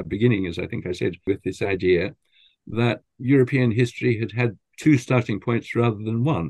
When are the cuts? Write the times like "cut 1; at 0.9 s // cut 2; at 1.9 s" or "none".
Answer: cut 1; at 1.3 s // cut 2; at 3.1 s // cut 3; at 4.6 s